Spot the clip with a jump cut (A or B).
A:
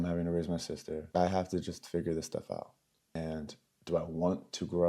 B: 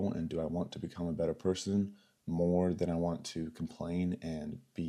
A